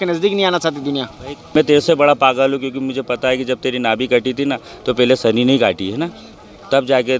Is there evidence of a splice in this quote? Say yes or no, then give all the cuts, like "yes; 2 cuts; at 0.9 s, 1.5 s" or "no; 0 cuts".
yes; 1 cut; at 1.5 s